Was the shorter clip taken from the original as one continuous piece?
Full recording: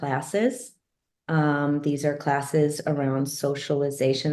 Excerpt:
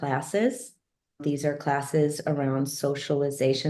no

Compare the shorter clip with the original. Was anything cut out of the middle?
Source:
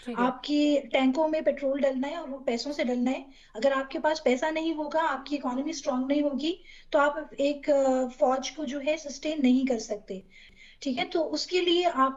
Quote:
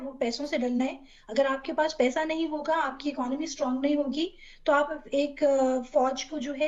no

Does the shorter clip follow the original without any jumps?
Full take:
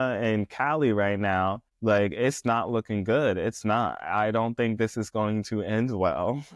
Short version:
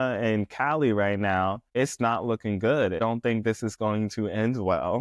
no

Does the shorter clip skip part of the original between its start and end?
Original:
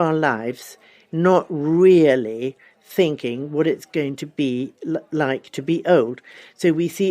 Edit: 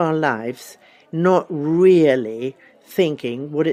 no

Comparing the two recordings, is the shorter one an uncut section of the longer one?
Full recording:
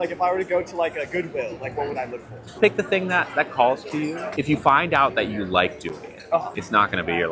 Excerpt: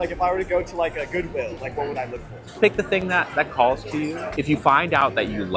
yes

